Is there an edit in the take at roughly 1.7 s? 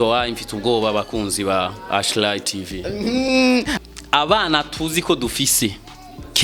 no; 1 cut; at 3.7 s

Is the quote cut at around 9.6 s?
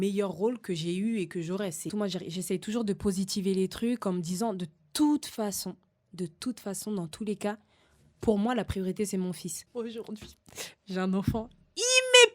yes; 2 cuts; at 1.9 s, 9.6 s

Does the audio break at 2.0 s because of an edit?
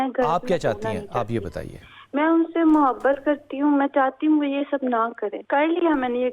no; 1 cut; at 5.4 s

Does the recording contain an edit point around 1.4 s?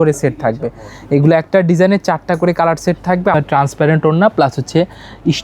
no; 1 cut; at 3.3 s

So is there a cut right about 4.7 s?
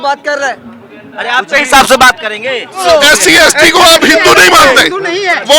no; 1 cut; at 2.8 s

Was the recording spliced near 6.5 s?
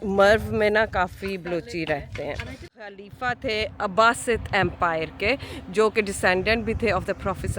no; 1 cut; at 2.9 s

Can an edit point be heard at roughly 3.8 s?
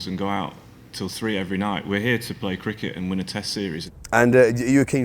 yes; 1 cut; at 3.8 s

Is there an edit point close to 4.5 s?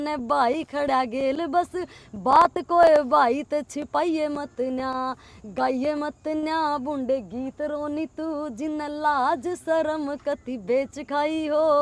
no; 0 cuts

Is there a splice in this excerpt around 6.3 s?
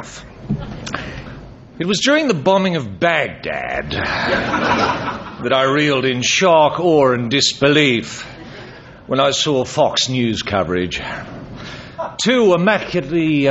no; 1 cut; at 1.2 s

